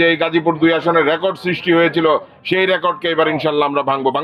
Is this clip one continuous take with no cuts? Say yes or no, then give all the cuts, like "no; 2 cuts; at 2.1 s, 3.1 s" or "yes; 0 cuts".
yes; 0 cuts